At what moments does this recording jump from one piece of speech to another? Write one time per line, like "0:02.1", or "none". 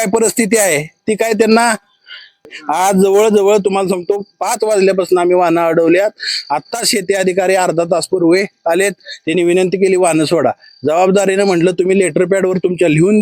0:02.5